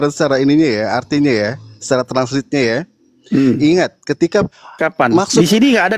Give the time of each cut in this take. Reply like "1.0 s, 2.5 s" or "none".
4.6 s